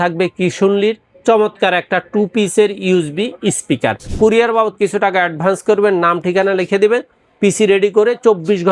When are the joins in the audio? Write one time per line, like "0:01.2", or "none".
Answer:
0:04.0